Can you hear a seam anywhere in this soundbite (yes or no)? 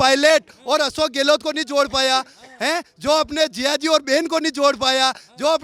no